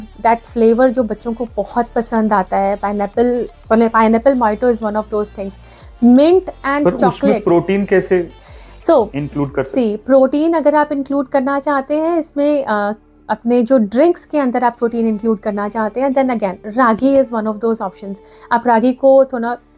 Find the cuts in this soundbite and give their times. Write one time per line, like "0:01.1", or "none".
none